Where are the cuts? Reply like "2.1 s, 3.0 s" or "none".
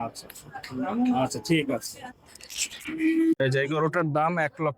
3.4 s